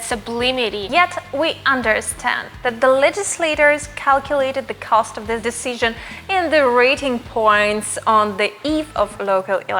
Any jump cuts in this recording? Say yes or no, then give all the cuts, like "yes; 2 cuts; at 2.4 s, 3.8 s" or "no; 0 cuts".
yes; 2 cuts; at 0.8 s, 5.4 s